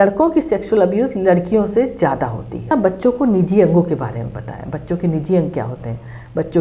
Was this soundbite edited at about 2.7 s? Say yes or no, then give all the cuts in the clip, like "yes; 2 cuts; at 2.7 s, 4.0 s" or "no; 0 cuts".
yes; 1 cut; at 2.7 s